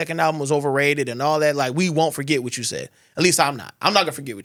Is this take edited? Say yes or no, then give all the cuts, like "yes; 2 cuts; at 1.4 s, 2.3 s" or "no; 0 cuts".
no; 0 cuts